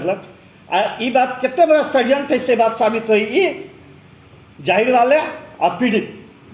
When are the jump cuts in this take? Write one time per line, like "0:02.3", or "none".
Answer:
none